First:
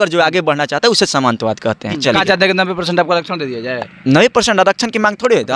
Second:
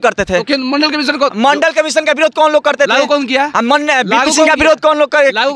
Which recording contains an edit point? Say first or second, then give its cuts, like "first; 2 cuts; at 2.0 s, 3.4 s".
first; 1 cut; at 2.0 s